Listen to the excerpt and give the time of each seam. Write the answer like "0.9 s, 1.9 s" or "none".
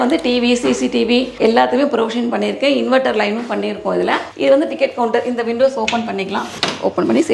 1.3 s